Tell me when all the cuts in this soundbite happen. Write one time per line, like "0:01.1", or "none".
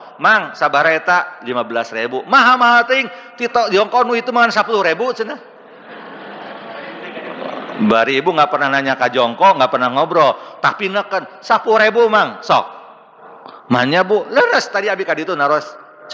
none